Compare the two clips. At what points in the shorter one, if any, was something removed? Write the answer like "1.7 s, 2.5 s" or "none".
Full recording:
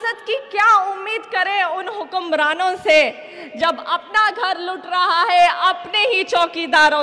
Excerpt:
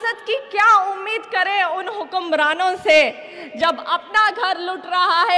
none